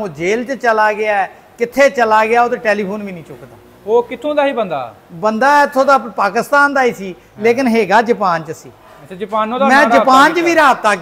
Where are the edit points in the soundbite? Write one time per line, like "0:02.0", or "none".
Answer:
none